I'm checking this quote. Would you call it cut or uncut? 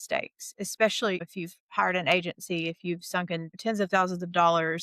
cut